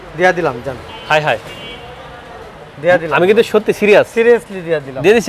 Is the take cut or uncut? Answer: uncut